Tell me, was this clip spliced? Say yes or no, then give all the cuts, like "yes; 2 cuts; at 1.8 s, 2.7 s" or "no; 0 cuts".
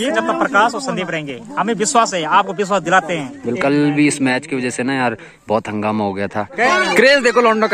yes; 2 cuts; at 3.6 s, 6.7 s